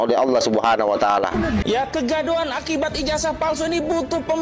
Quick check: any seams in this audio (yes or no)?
yes